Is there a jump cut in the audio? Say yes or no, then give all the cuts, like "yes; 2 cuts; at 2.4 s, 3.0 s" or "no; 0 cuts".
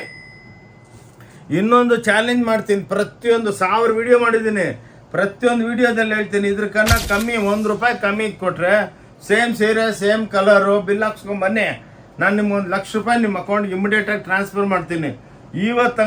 no; 0 cuts